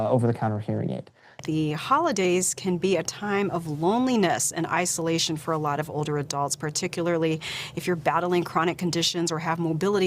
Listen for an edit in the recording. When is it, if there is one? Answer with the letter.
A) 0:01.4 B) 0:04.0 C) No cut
A